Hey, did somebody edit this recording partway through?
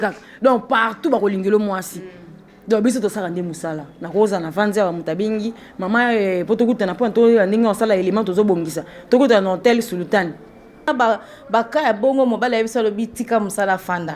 yes; 1 cut; at 10.9 s

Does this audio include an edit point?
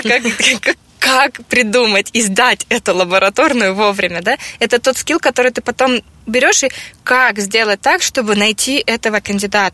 no; 0 cuts

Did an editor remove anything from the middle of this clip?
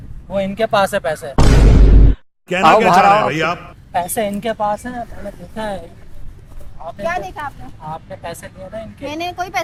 no; 0 cuts

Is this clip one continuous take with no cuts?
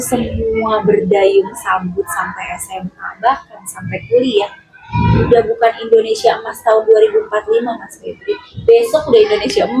yes; 0 cuts

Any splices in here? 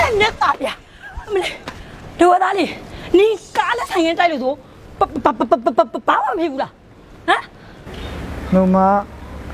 no; 0 cuts

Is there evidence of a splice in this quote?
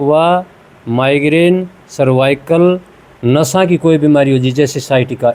no; 0 cuts

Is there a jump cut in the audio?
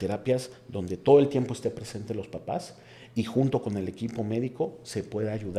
no; 0 cuts

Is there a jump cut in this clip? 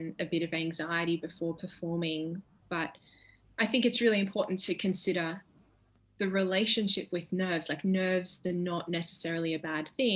no; 0 cuts

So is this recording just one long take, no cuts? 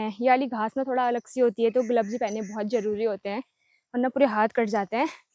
yes; 0 cuts

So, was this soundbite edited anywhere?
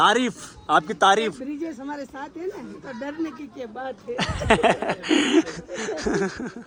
no; 0 cuts

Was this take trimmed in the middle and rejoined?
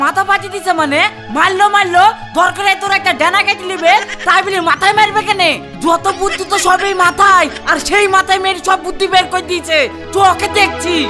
no; 0 cuts

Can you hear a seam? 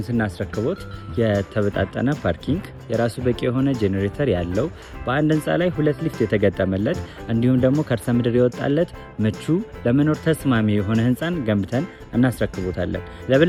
no; 0 cuts

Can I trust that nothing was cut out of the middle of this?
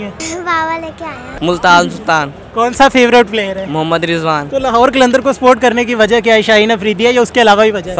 no; 2 cuts; at 1.2 s, 4.4 s

